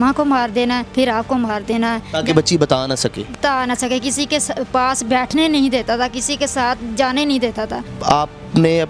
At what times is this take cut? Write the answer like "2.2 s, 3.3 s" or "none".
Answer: 0.9 s, 7.8 s

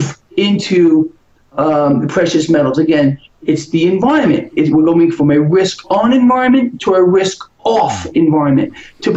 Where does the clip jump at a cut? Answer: none

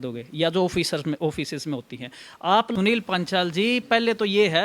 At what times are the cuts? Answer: 2.7 s

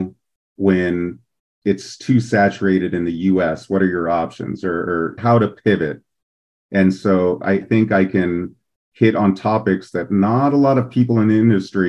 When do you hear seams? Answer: 5.2 s, 7.6 s

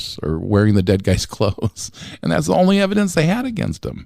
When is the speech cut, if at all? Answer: none

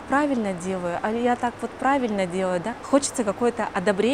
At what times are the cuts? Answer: 2.7 s

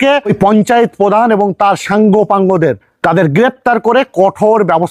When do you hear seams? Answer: none

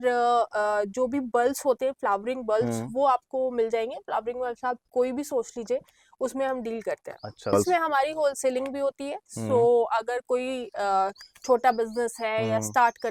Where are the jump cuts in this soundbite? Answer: none

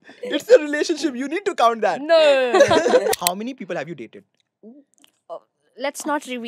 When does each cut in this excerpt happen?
3.1 s

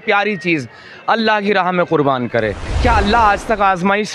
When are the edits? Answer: 2.7 s

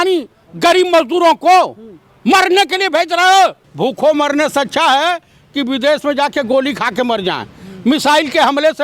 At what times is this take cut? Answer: 3.6 s

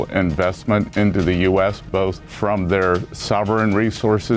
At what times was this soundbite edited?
0.9 s, 2.3 s, 3.1 s

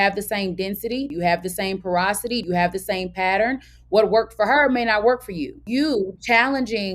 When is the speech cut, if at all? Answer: 1.1 s, 2.4 s, 5.7 s

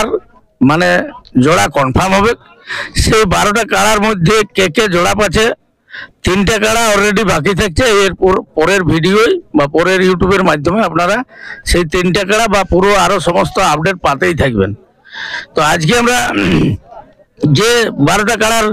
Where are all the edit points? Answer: none

